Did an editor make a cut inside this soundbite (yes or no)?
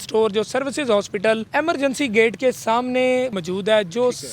yes